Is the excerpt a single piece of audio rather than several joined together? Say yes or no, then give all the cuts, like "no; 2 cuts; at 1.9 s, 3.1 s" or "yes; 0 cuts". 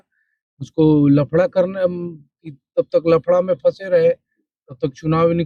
yes; 0 cuts